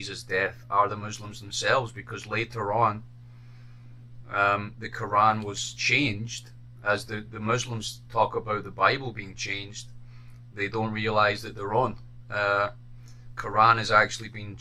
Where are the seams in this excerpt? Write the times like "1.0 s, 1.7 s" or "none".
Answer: none

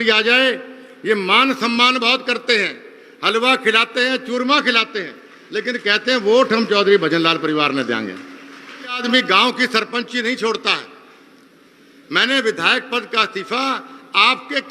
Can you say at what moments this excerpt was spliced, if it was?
9.0 s

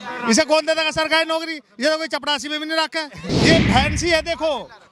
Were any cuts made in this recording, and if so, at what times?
3.4 s

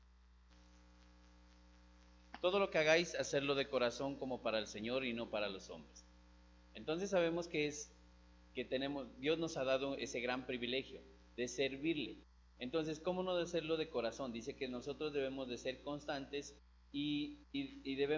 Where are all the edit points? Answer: 4.8 s

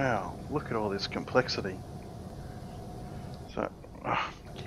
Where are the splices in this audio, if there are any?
2.3 s

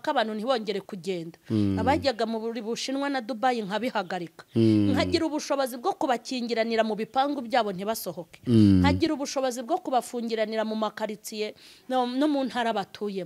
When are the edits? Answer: none

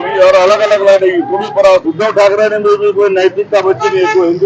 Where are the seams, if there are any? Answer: 1.9 s

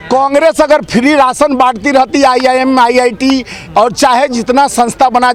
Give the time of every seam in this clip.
none

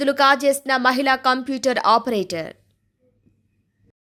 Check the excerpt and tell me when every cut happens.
none

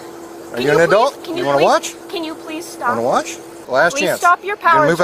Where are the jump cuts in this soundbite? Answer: 3.6 s

